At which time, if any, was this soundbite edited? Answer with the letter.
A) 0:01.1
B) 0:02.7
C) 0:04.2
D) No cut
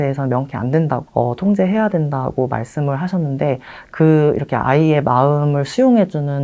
A